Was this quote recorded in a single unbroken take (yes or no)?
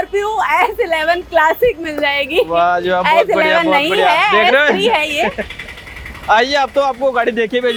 yes